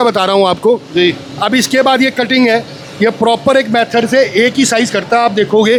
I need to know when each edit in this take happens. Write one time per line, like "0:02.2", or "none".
none